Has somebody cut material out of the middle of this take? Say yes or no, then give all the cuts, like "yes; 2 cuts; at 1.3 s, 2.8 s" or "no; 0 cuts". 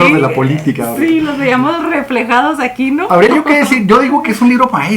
no; 0 cuts